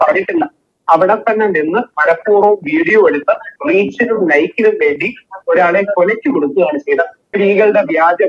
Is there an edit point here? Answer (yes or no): yes